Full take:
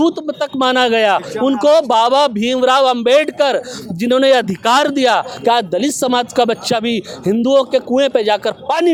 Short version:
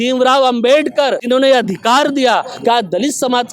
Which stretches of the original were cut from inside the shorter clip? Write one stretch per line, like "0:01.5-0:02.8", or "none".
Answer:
0:03.6-0:04.0